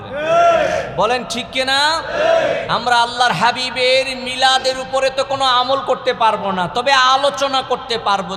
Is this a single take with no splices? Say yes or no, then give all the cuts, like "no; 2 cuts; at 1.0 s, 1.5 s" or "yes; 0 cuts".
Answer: yes; 0 cuts